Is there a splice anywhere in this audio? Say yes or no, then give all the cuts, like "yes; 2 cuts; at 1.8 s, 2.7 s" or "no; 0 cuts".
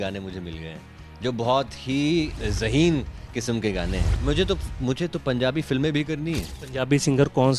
yes; 3 cuts; at 2.4 s, 4.1 s, 6.6 s